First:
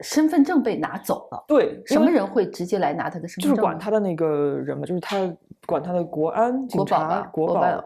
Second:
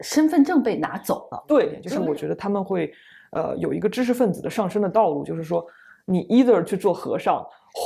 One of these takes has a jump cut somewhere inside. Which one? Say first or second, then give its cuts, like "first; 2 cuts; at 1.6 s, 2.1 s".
second; 1 cut; at 1.8 s